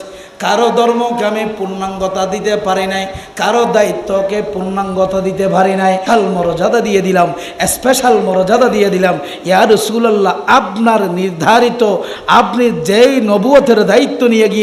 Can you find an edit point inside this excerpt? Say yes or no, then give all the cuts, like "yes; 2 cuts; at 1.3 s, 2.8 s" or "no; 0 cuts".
yes; 1 cut; at 6.0 s